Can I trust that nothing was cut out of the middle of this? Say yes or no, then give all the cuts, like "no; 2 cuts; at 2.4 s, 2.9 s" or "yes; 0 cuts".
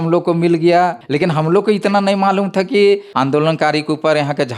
no; 2 cuts; at 1.0 s, 3.1 s